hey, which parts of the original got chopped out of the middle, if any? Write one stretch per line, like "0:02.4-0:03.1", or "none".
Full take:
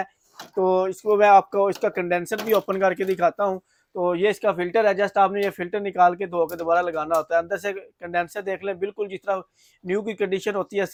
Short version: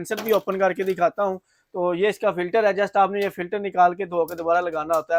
none